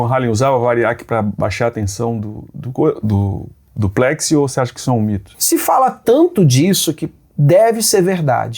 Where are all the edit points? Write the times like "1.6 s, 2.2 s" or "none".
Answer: 5.3 s